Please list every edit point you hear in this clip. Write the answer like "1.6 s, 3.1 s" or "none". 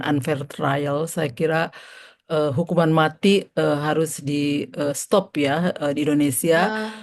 none

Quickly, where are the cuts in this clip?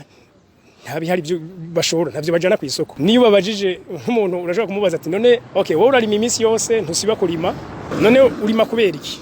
2.9 s, 5.5 s, 7.9 s

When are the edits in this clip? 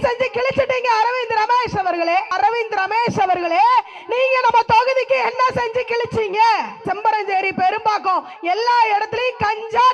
2.3 s, 6.8 s

